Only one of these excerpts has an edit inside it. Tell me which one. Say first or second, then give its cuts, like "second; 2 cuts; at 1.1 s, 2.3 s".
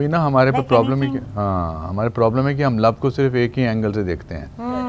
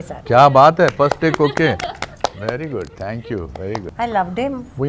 second; 1 cut; at 3.9 s